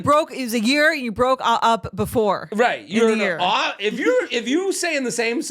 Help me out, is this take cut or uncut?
uncut